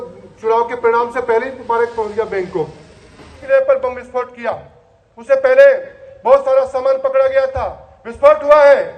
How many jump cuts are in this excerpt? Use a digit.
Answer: 1